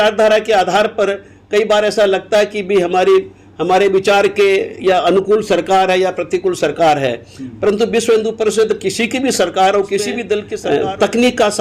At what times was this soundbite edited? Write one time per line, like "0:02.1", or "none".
0:10.5